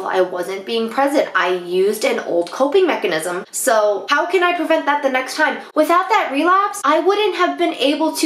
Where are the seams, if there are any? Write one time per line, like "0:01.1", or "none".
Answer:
0:04.0
0:06.7